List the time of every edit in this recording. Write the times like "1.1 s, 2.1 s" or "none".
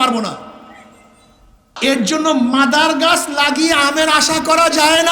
1.7 s